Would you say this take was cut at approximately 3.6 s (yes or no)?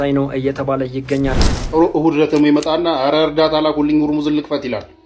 no